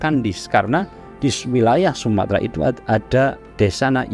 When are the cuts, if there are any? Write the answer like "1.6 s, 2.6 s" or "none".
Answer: none